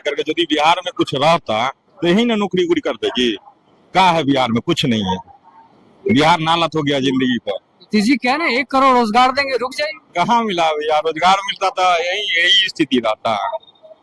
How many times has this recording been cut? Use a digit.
0